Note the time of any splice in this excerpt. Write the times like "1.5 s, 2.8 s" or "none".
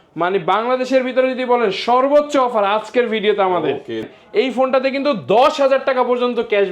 4.1 s